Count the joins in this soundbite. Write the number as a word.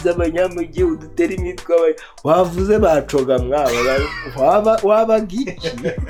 zero